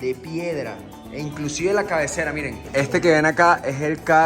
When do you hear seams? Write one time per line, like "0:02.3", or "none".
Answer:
0:02.6

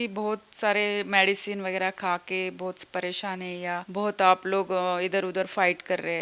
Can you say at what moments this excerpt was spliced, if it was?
0:03.9

